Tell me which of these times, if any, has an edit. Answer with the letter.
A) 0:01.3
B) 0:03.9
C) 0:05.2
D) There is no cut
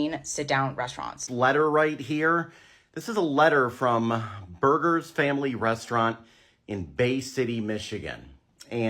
A